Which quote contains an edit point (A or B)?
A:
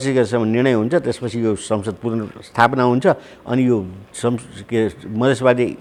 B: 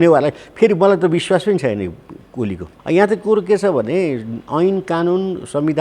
B